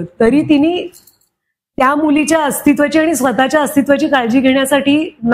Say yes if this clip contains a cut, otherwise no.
no